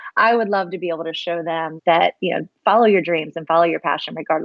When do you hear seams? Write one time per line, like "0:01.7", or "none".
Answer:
none